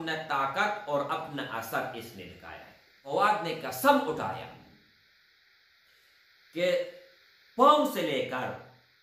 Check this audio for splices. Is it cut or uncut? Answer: cut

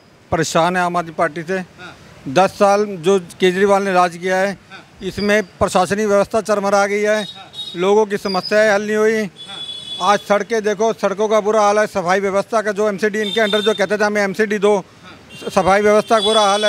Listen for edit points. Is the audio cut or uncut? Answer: uncut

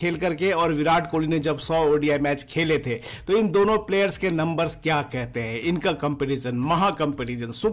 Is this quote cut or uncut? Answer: uncut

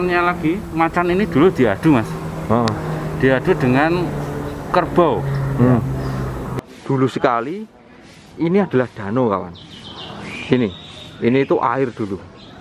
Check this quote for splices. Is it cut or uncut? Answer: cut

